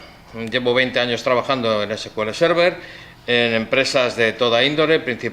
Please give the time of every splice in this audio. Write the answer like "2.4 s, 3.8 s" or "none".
2.1 s